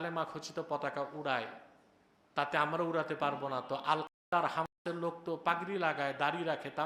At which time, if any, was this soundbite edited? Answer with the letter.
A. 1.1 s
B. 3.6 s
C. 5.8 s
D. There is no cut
D